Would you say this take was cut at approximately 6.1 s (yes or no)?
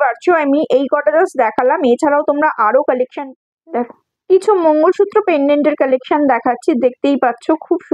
no